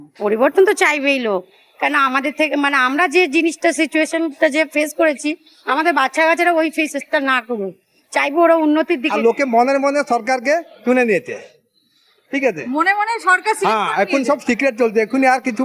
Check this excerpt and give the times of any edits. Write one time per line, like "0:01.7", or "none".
0:09.0